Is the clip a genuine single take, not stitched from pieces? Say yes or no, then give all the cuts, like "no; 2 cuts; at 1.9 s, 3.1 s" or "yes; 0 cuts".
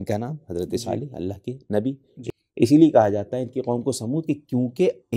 no; 1 cut; at 2.1 s